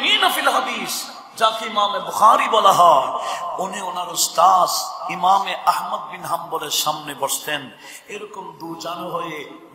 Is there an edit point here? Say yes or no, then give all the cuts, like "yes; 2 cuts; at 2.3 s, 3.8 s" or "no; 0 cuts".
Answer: no; 0 cuts